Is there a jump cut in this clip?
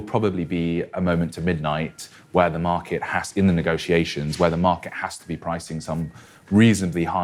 no; 0 cuts

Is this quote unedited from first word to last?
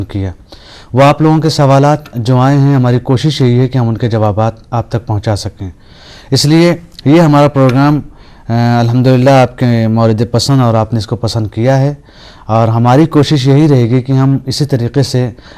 yes; 0 cuts

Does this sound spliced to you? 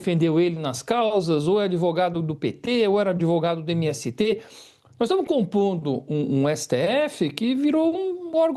no; 0 cuts

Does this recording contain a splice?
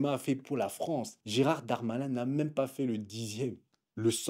no; 0 cuts

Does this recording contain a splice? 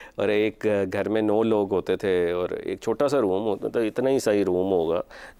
no; 0 cuts

